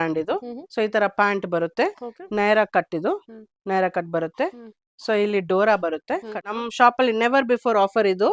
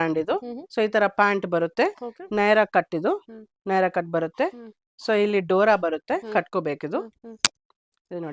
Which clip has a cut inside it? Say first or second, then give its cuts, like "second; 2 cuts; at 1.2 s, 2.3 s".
first; 1 cut; at 6.4 s